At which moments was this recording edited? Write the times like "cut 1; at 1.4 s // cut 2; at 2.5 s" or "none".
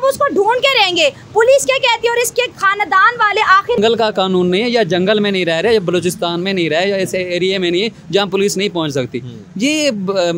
cut 1; at 3.8 s